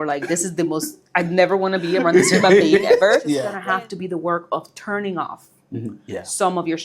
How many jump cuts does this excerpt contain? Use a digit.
1